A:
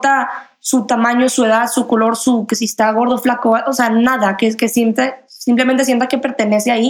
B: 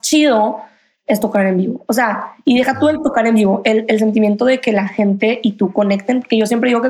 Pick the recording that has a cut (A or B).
B